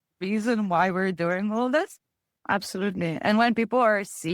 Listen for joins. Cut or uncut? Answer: cut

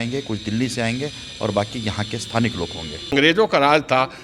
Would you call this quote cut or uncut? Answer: cut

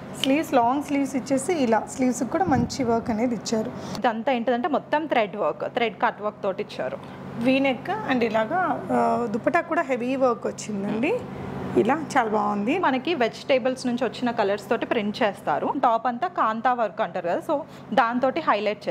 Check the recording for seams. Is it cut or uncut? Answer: cut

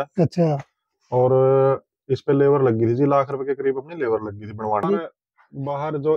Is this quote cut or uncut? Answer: cut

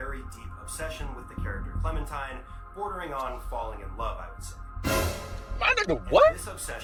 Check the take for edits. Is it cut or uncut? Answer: uncut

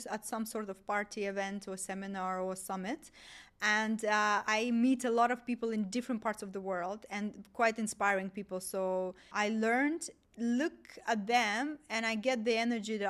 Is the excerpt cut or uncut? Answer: cut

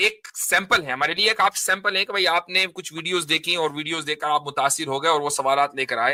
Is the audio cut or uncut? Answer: uncut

